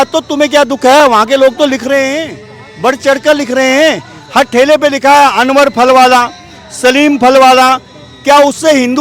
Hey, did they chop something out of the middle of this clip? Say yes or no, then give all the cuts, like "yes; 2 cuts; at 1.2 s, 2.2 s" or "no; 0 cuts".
no; 0 cuts